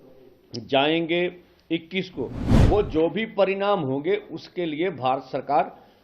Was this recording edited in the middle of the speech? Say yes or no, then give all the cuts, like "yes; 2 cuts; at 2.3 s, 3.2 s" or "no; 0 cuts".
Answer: yes; 1 cut; at 2.4 s